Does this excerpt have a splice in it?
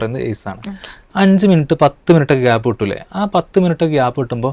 yes; 1 cut; at 1.0 s

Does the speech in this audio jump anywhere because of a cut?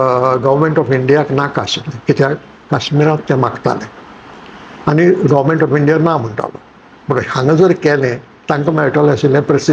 no; 0 cuts

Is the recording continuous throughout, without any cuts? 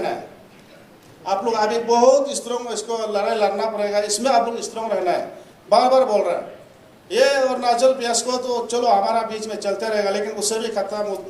yes; 0 cuts

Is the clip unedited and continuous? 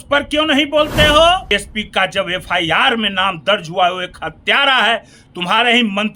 no; 1 cut; at 1.4 s

